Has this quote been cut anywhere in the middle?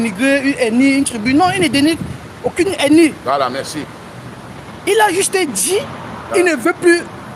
no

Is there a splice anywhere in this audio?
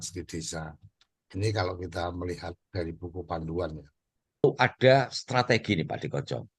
yes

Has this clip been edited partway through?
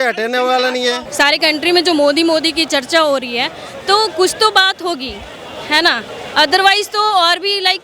yes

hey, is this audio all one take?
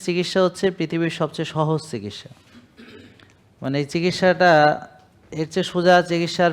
yes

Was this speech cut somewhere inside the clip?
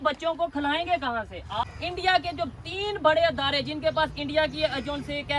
yes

